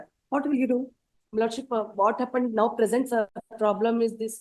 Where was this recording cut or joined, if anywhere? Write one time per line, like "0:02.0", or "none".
0:03.4